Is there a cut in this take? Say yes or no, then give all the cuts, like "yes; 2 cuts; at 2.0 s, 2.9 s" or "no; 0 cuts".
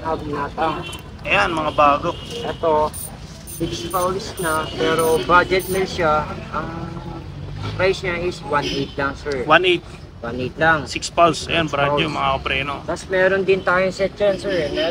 no; 0 cuts